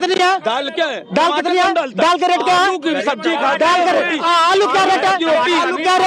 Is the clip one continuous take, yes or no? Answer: yes